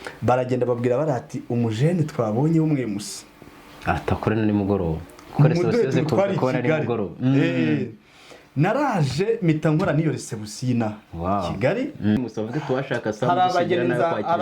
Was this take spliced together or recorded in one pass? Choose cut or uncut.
cut